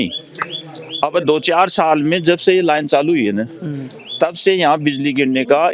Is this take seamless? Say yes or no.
yes